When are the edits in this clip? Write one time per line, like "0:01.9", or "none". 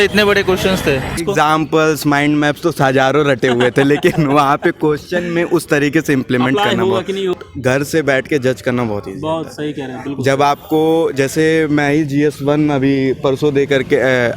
0:01.2
0:07.4